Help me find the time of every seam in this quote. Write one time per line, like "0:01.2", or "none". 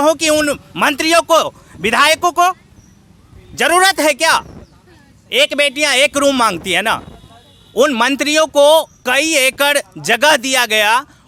none